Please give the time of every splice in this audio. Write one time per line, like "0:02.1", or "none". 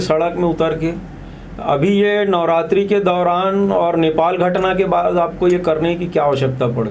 none